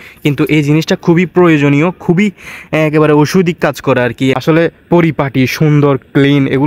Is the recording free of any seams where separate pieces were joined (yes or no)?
no